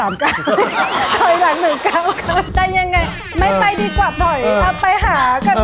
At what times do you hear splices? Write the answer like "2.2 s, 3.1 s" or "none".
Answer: 2.5 s